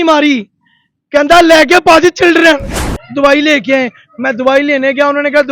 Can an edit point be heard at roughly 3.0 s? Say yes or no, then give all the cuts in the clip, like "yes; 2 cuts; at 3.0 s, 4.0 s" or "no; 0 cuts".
yes; 1 cut; at 3.0 s